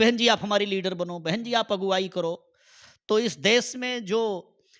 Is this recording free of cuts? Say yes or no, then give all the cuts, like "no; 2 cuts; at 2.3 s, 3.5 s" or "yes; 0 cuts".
yes; 0 cuts